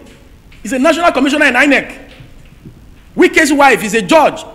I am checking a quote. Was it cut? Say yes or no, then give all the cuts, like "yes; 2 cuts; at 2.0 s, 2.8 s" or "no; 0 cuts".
no; 0 cuts